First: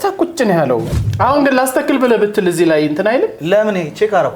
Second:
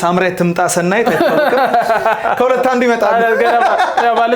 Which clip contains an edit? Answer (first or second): first